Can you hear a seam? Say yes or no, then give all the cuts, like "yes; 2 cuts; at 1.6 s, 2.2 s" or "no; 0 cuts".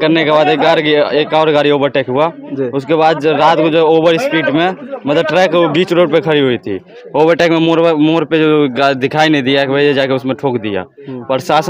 no; 0 cuts